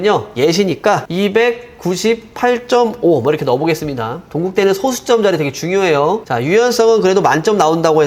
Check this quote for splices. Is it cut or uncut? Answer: uncut